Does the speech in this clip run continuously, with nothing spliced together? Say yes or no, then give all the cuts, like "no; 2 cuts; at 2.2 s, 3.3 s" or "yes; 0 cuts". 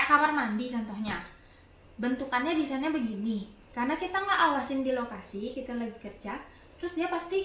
yes; 0 cuts